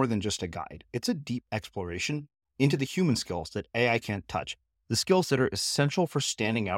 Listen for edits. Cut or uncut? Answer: uncut